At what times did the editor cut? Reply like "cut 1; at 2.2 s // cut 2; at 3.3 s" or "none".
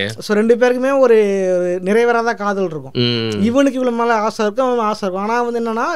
none